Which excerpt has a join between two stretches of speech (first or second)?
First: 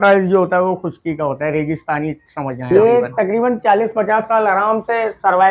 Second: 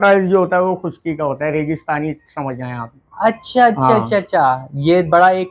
first